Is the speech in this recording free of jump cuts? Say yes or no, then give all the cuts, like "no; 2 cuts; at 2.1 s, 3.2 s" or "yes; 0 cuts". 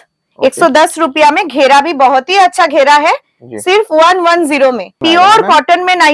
no; 1 cut; at 5.0 s